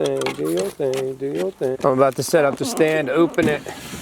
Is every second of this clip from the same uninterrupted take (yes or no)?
no